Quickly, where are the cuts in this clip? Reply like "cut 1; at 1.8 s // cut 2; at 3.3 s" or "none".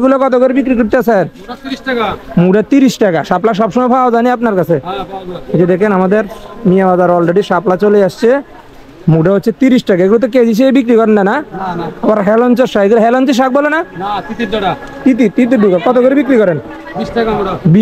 none